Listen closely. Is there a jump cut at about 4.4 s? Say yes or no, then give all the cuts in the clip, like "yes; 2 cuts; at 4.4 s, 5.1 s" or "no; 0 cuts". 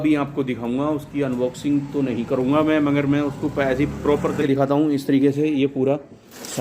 yes; 1 cut; at 4.4 s